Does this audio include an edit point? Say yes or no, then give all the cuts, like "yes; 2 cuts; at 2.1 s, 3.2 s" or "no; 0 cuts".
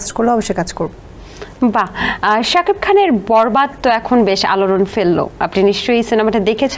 no; 0 cuts